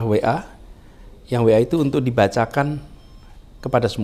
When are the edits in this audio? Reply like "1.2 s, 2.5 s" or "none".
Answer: none